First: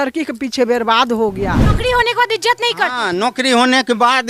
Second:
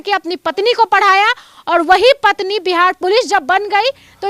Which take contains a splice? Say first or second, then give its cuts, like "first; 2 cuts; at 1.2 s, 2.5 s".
first; 1 cut; at 1.7 s